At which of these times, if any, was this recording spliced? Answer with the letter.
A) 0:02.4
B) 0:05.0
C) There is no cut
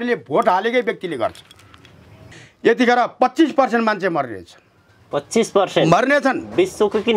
A